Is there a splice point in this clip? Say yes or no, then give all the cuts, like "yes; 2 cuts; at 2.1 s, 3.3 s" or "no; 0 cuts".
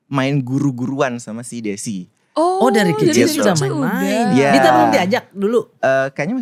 no; 0 cuts